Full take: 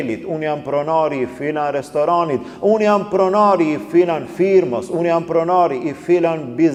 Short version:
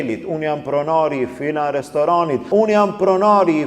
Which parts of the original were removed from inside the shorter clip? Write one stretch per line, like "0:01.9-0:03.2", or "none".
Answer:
0:02.4-0:02.6